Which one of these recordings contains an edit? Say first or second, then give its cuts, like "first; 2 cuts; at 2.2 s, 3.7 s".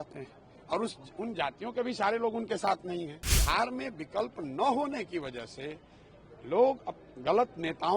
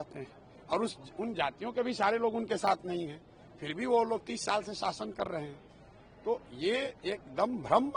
first; 1 cut; at 3.3 s